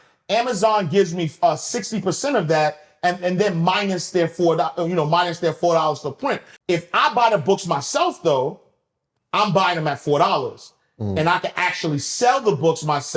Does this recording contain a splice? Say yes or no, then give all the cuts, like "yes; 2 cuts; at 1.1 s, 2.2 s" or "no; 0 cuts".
yes; 1 cut; at 6.5 s